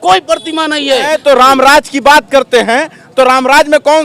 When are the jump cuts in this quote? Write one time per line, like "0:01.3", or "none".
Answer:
0:01.1